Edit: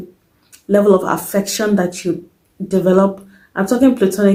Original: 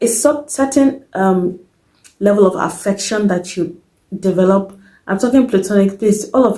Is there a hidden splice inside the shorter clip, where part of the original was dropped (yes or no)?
no